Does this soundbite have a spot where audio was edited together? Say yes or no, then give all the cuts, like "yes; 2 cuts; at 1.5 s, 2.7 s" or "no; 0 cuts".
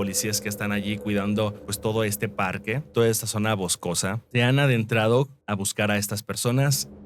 no; 0 cuts